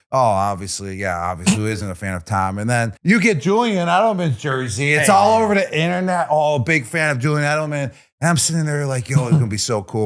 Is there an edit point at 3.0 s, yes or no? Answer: yes